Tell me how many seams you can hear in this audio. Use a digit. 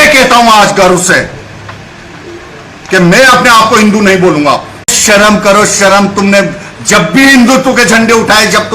1